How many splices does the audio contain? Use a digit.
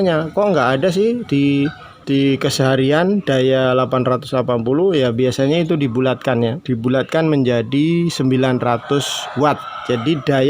1